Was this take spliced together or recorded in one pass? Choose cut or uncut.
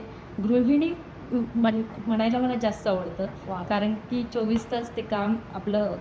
uncut